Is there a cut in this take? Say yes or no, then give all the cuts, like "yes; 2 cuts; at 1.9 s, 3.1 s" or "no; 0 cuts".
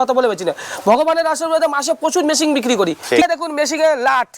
yes; 1 cut; at 3.2 s